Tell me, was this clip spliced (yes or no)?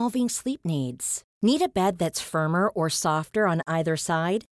no